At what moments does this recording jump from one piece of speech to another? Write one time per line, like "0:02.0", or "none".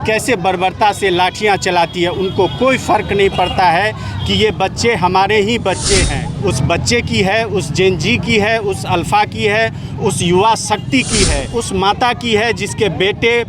0:06.2
0:11.4